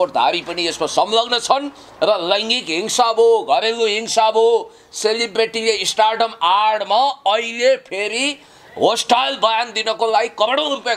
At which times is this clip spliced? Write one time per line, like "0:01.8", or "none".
none